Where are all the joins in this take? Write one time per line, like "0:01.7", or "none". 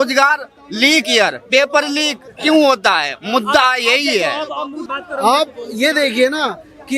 0:04.9